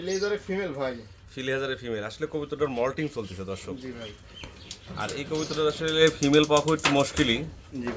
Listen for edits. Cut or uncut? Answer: uncut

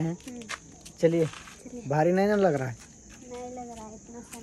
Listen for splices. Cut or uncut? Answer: uncut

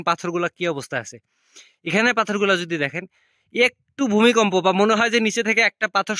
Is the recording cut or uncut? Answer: uncut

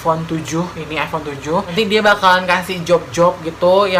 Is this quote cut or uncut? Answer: cut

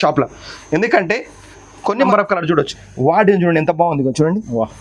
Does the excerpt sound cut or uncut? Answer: cut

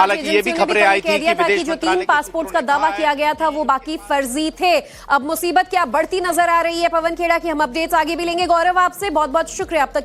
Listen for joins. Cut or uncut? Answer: uncut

